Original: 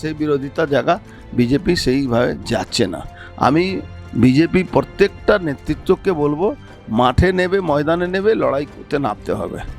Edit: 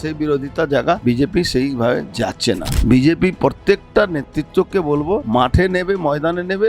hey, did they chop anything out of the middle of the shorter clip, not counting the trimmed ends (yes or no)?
yes